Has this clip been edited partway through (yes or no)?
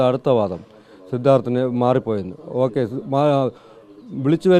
no